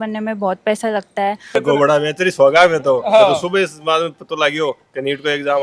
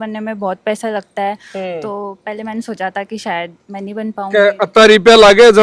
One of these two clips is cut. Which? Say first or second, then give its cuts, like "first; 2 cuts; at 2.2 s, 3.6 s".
first; 1 cut; at 1.6 s